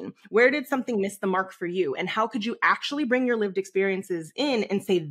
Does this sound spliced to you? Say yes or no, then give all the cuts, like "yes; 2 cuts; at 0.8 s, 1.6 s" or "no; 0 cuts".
no; 0 cuts